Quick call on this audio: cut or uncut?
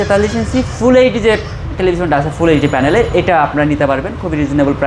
uncut